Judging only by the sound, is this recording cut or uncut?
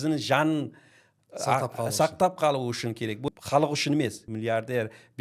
cut